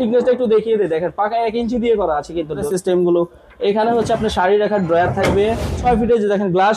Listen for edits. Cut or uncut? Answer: cut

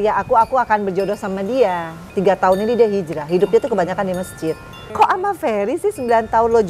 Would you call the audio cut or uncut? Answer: cut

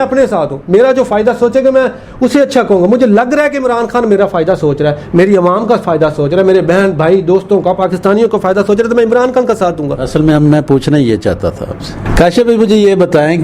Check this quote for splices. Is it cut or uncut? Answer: uncut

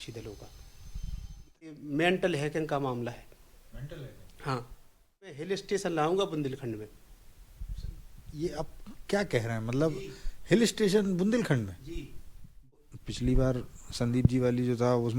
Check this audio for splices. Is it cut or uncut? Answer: cut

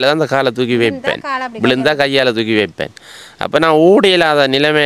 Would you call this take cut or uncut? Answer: uncut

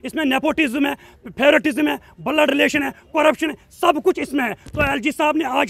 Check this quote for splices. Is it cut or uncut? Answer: uncut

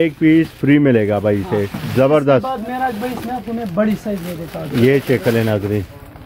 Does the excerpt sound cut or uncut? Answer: uncut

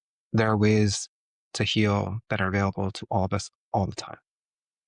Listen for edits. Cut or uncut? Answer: uncut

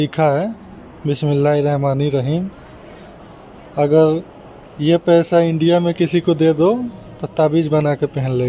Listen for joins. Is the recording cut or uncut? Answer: uncut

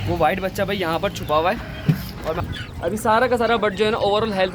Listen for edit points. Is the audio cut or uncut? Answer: cut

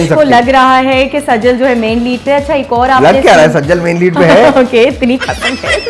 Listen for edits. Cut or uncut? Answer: uncut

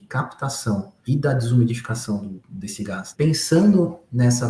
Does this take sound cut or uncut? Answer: cut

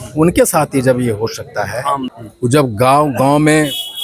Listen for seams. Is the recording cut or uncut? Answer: cut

